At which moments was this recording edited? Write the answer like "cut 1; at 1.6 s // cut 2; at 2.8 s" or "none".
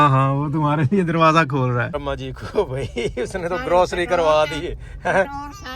cut 1; at 1.9 s